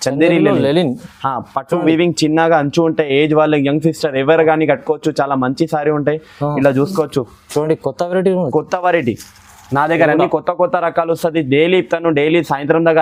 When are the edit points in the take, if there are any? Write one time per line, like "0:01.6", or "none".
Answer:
none